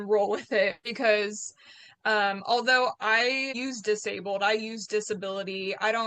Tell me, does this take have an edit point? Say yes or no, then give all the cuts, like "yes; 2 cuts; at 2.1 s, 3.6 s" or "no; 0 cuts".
yes; 1 cut; at 3.5 s